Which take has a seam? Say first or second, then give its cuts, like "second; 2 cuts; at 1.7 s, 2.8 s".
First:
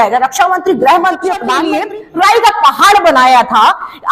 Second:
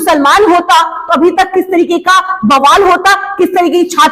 first; 1 cut; at 1.6 s